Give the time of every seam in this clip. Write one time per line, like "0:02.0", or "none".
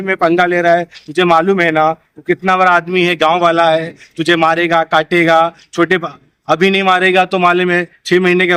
none